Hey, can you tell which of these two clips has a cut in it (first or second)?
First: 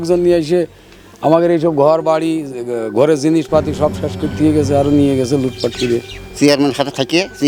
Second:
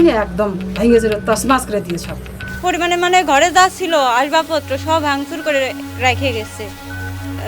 second